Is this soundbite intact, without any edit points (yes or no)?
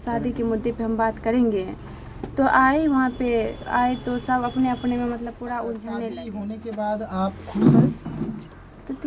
no